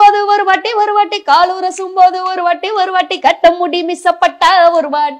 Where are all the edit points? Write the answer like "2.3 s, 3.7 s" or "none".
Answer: none